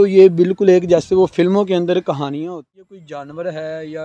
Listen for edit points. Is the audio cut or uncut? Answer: cut